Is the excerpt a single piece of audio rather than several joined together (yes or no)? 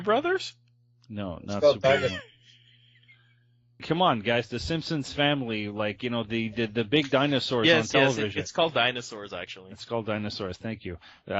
no